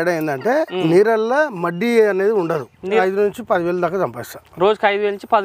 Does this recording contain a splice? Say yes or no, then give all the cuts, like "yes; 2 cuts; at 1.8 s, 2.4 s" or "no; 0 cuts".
yes; 1 cut; at 2.9 s